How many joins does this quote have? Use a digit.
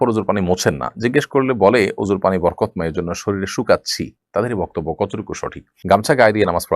1